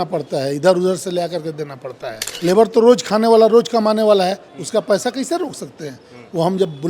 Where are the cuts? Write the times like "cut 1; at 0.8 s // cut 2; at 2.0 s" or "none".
cut 1; at 2.3 s